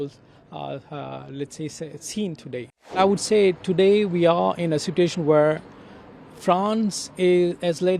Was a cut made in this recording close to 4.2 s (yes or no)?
no